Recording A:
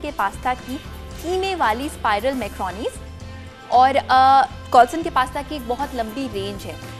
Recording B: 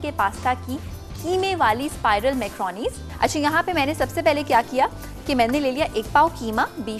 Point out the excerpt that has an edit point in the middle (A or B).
B